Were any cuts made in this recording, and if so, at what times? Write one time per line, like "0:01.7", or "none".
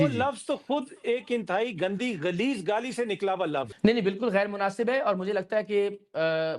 0:03.7